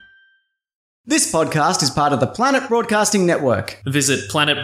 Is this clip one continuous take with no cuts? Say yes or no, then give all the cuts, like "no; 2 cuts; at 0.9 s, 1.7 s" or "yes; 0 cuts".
no; 1 cut; at 1.1 s